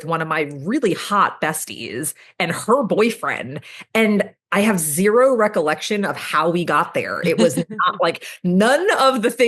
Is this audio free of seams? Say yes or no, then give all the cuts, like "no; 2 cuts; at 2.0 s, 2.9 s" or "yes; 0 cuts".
yes; 0 cuts